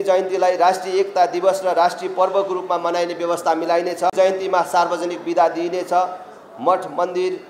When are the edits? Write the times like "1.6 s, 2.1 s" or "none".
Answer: none